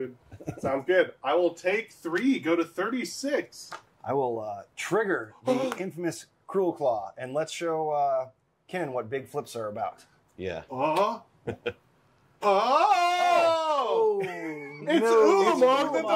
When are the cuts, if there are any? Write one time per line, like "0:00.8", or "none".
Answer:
none